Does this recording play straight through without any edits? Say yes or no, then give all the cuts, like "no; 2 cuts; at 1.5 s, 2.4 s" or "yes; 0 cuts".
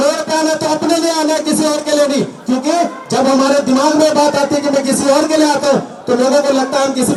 yes; 0 cuts